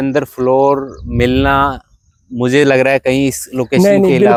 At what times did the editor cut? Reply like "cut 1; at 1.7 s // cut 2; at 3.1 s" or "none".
none